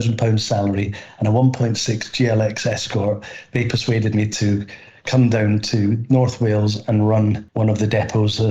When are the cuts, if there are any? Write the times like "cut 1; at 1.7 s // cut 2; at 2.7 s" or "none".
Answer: cut 1; at 7.5 s